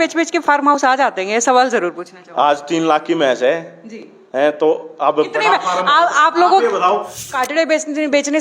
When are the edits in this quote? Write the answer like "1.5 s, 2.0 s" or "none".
7.4 s